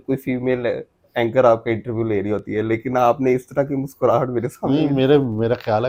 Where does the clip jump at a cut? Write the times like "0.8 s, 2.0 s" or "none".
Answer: none